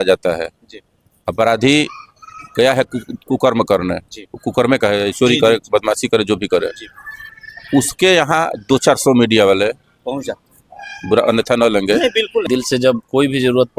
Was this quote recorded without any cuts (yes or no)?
no